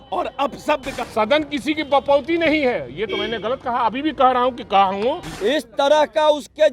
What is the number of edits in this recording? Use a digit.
2